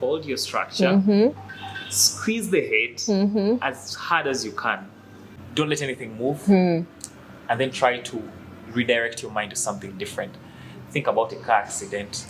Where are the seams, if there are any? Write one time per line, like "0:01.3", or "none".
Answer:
0:05.3